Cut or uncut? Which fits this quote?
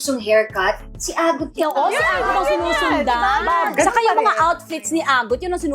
cut